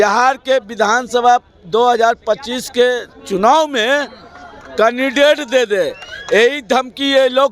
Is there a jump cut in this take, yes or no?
no